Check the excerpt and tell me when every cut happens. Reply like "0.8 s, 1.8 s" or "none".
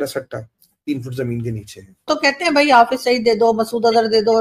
2.1 s